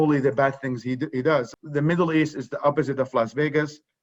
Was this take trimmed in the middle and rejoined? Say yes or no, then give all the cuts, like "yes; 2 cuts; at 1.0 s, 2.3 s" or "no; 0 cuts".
yes; 1 cut; at 1.5 s